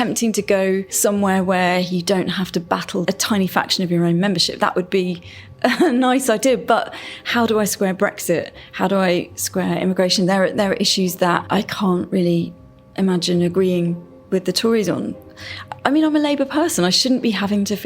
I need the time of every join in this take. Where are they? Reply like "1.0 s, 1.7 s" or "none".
0.9 s, 3.0 s, 11.4 s, 15.2 s